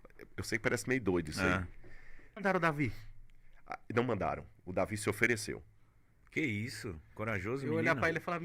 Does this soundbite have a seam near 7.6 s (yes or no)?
no